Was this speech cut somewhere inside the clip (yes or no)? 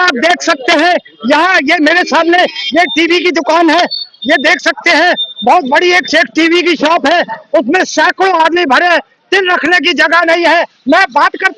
no